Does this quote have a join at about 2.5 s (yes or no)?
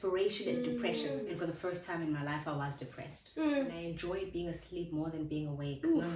no